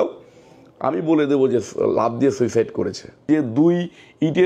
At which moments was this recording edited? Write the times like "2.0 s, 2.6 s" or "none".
3.3 s